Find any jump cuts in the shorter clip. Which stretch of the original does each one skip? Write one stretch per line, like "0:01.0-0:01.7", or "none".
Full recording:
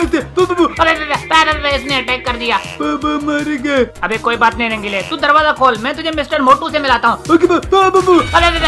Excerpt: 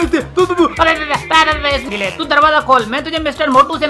0:01.9-0:04.8